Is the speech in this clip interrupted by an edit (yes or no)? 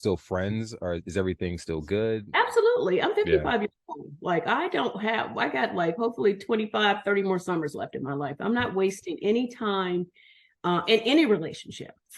yes